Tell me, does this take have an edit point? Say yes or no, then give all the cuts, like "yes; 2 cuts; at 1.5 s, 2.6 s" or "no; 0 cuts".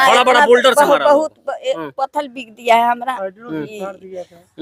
no; 0 cuts